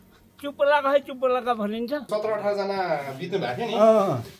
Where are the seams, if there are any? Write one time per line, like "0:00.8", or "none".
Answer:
0:02.1